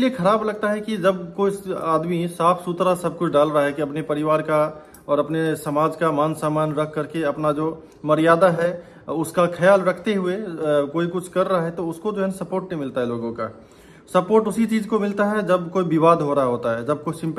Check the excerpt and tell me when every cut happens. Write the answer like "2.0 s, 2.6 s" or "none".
none